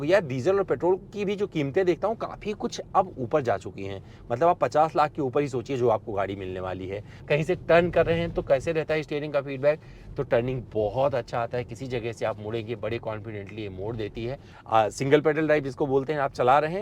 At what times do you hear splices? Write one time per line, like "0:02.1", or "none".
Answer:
0:07.2
0:14.5